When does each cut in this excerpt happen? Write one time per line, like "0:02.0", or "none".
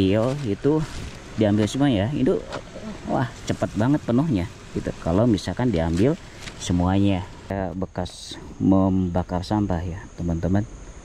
0:07.5